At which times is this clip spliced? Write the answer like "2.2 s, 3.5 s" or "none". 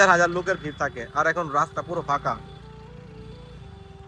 none